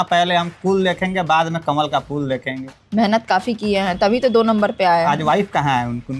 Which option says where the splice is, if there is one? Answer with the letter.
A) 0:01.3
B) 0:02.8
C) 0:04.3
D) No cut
B